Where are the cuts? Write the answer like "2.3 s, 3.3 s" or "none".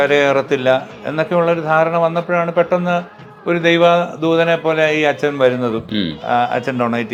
none